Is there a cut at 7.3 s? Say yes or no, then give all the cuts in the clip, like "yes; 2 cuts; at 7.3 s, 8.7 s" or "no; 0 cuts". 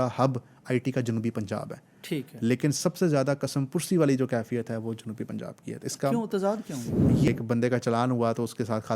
yes; 1 cut; at 7.3 s